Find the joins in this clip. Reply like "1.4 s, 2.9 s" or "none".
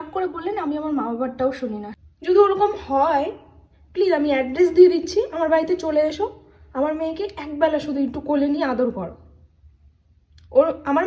1.9 s